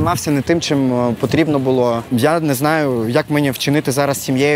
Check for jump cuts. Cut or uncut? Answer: cut